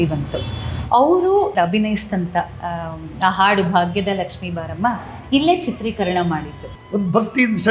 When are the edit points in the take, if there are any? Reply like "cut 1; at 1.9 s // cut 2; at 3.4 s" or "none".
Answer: cut 1; at 1.5 s // cut 2; at 6.8 s